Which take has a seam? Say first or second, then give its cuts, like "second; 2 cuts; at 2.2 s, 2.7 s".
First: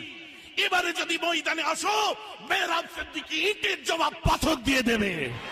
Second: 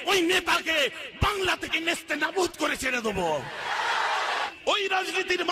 second; 1 cut; at 4.5 s